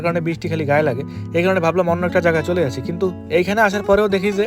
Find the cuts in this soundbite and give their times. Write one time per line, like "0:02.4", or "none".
none